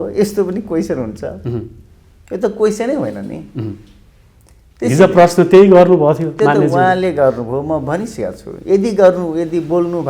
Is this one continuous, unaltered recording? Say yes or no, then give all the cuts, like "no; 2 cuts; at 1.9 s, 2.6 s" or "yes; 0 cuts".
yes; 0 cuts